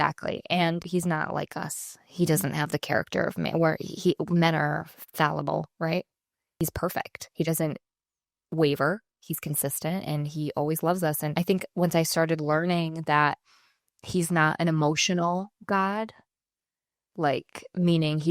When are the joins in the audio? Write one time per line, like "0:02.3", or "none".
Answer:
0:00.8
0:06.5